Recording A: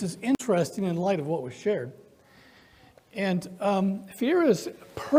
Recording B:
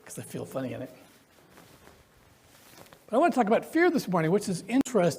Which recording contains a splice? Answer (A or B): B